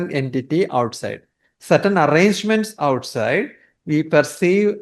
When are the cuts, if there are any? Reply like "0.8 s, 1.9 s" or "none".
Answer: none